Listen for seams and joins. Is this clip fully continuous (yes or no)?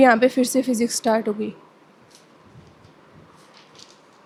yes